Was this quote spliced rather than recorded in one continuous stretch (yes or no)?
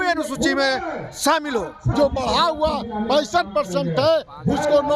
yes